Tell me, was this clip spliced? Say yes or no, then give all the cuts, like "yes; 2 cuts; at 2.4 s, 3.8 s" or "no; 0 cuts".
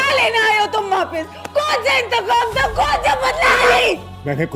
yes; 1 cut; at 3.5 s